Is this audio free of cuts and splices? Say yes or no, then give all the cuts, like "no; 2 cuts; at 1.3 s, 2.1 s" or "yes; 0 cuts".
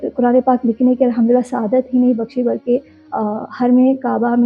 yes; 0 cuts